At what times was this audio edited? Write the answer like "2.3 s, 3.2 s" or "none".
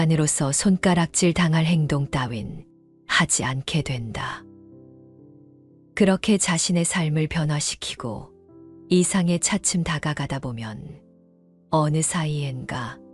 4.4 s, 5.9 s